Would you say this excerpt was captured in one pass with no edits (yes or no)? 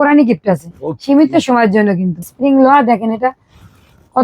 no